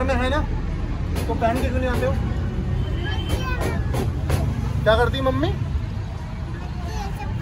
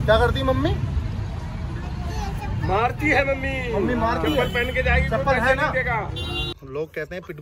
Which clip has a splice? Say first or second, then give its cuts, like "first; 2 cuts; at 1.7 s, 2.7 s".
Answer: second; 1 cut; at 6.5 s